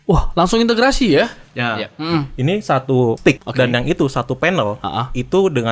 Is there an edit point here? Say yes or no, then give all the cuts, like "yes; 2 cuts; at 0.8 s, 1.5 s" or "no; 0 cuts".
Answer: yes; 2 cuts; at 2.0 s, 3.4 s